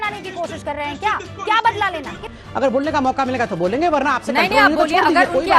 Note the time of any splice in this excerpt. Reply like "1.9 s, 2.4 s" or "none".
2.2 s

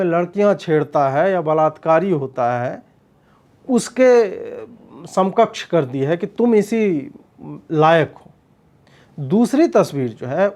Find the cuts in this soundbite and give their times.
none

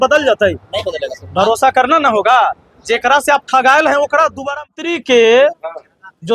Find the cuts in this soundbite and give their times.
4.5 s

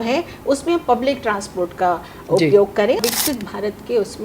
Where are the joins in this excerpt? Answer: 3.0 s

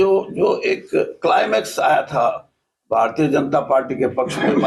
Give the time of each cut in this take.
none

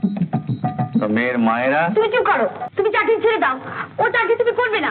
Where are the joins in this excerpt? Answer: 2.6 s

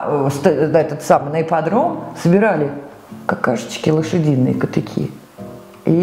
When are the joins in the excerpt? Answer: none

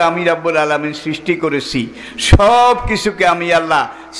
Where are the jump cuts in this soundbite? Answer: none

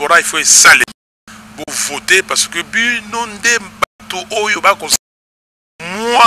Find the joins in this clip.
none

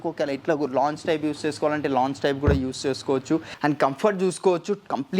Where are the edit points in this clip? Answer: 3.5 s

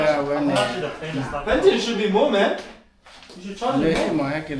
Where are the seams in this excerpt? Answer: none

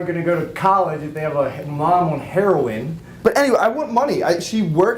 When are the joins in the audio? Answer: 3.1 s

